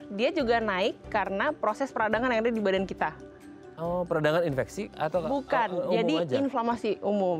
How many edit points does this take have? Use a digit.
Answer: 0